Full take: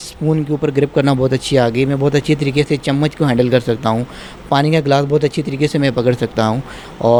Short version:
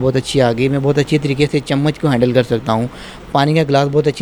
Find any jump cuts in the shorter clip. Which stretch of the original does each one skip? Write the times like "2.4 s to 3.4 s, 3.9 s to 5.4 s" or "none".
none